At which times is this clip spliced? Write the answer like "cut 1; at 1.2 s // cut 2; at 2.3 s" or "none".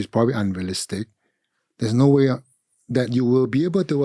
none